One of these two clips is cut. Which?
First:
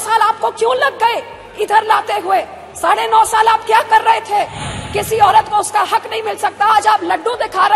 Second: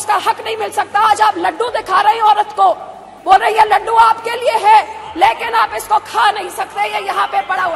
first; 1 cut; at 4.7 s

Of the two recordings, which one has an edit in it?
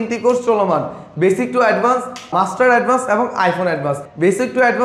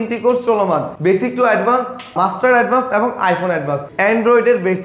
second; 2 cuts; at 0.9 s, 3.9 s

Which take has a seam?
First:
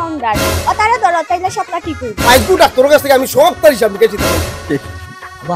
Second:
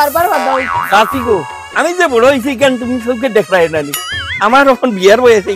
first; 1 cut; at 2.1 s

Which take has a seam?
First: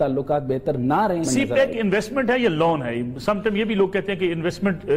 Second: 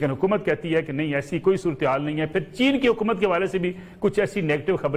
first; 1 cut; at 1.3 s

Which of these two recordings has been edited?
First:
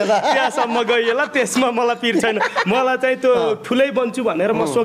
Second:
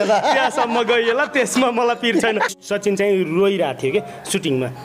second; 1 cut; at 2.6 s

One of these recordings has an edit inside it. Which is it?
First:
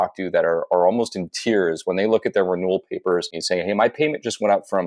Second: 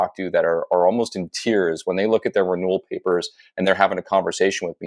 first; 1 cut; at 3.3 s

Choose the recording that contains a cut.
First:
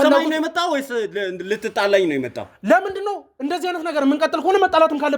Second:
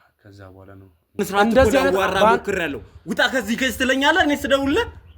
second; 1 cut; at 1.2 s

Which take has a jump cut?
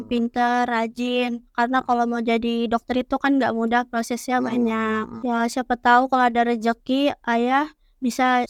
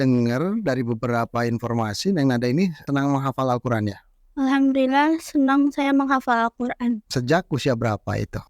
second; 2 cuts; at 2.8 s, 7.1 s

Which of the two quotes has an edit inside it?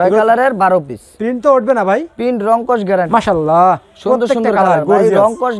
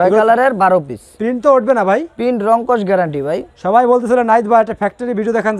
first; 1 cut; at 3.1 s

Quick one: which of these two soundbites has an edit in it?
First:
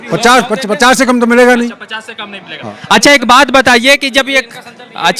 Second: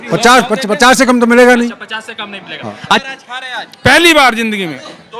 second; 1 cut; at 3.0 s

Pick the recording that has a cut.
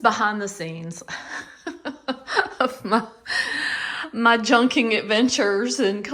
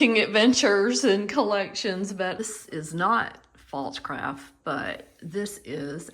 second; 1 cut; at 2.4 s

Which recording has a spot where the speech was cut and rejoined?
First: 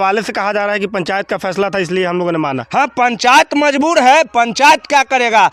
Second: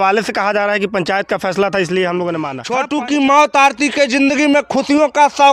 second; 1 cut; at 2.6 s

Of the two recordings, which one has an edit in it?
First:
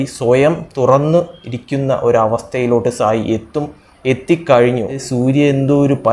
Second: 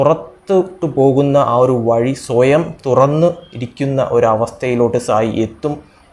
first; 1 cut; at 5.0 s

